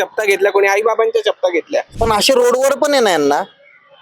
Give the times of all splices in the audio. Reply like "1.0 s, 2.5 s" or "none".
1.9 s